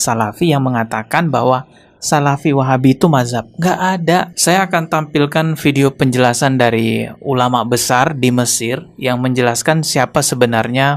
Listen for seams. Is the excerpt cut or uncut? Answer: cut